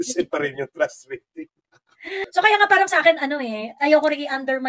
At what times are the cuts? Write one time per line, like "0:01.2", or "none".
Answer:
0:02.2